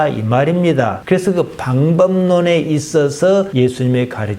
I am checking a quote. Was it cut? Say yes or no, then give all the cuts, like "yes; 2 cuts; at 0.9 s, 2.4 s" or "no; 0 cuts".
yes; 1 cut; at 3.5 s